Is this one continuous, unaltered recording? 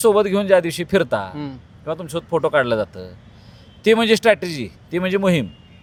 yes; 0 cuts

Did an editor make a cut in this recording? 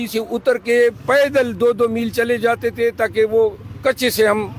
no; 0 cuts

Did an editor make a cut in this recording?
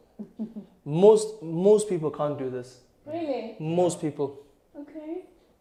no; 0 cuts

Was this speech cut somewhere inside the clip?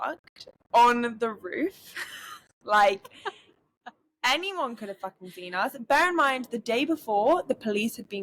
no; 0 cuts

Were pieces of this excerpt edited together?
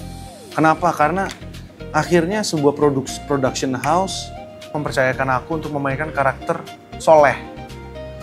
yes; 1 cut; at 4.8 s

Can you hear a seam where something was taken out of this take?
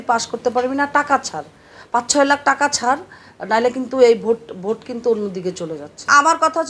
no; 0 cuts

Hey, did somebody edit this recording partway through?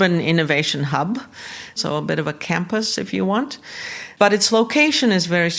yes; 2 cuts; at 1.8 s, 4.0 s

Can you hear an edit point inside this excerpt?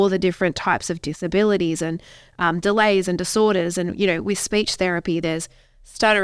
no; 0 cuts

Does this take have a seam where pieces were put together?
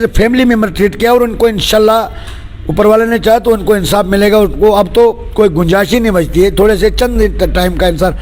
no; 0 cuts

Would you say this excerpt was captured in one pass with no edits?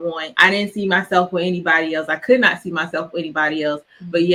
yes; 0 cuts

